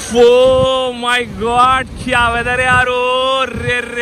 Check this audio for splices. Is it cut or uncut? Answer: uncut